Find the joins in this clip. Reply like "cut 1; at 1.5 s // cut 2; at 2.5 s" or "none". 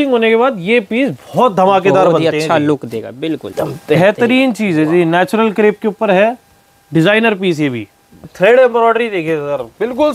cut 1; at 3.5 s // cut 2; at 8.3 s